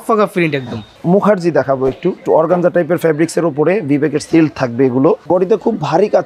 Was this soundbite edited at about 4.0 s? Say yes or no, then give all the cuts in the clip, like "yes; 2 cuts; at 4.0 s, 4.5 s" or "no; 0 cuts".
no; 3 cuts; at 0.9 s, 2.2 s, 5.2 s